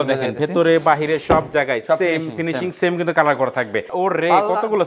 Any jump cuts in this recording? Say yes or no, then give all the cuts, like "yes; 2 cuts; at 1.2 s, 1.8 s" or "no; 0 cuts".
yes; 1 cut; at 3.9 s